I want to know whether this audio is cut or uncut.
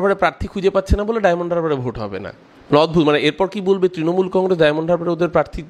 uncut